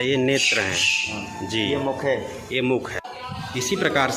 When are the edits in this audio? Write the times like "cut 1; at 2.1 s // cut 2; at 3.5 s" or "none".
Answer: cut 1; at 3.1 s

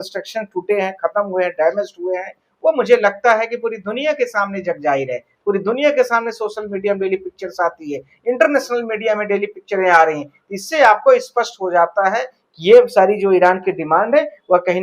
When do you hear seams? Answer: none

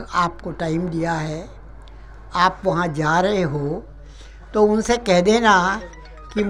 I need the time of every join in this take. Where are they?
none

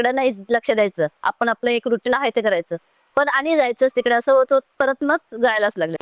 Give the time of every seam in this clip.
none

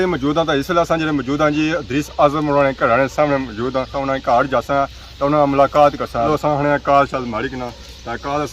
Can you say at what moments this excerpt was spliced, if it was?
cut 1; at 3.9 s // cut 2; at 6.3 s

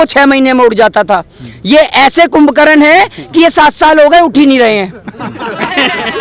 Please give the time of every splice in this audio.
none

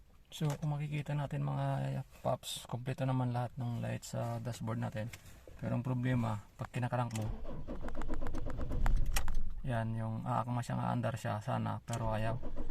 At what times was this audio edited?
none

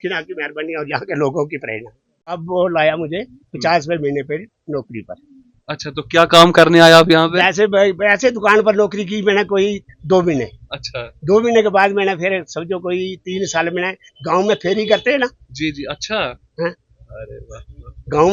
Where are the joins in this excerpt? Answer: cut 1; at 2.4 s

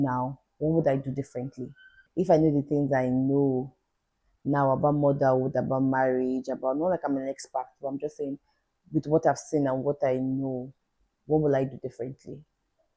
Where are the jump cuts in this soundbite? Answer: none

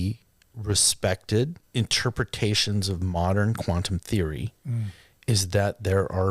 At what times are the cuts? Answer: cut 1; at 1.6 s

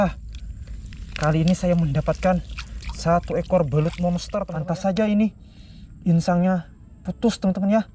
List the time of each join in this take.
cut 1; at 4.3 s

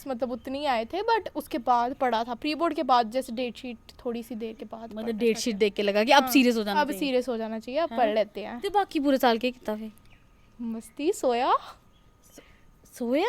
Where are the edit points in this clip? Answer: none

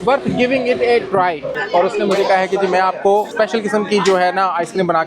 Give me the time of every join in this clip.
cut 1; at 1.6 s

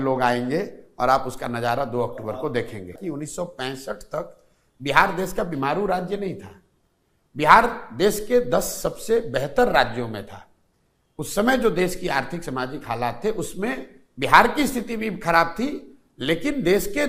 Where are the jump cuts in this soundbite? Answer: cut 1; at 2.9 s

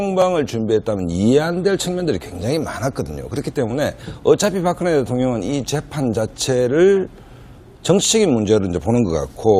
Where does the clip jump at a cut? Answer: cut 1; at 5.7 s

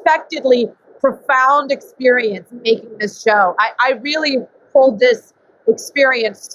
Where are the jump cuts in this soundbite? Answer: none

